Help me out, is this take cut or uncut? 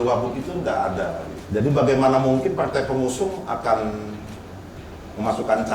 cut